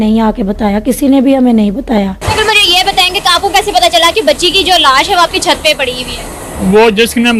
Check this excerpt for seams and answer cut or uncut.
uncut